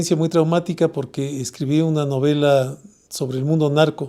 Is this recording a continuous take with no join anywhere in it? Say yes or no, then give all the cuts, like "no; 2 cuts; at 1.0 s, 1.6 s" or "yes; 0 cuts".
yes; 0 cuts